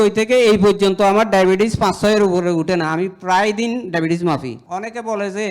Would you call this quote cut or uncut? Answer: cut